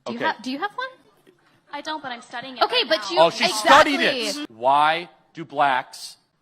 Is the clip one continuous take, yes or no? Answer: no